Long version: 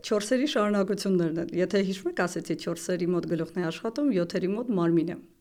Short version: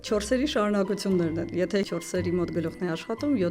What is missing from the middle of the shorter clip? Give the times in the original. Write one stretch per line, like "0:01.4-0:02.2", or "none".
0:01.9-0:02.6